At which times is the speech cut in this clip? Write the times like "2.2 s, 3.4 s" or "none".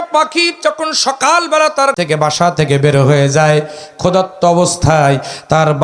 1.9 s